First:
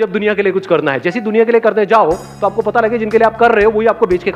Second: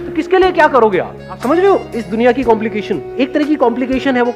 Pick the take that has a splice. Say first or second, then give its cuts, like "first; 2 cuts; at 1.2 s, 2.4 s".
second; 2 cuts; at 1.4 s, 3.1 s